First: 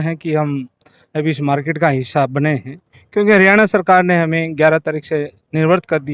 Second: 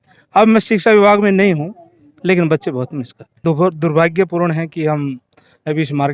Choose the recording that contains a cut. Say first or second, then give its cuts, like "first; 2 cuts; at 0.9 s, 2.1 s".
second; 1 cut; at 3.4 s